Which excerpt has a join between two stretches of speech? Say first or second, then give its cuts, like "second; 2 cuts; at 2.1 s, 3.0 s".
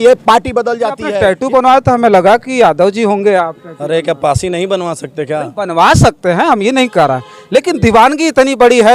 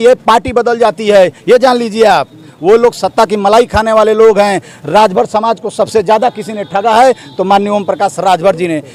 first; 1 cut; at 1.0 s